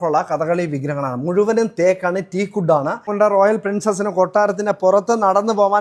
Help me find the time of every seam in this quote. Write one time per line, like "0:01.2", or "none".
0:03.1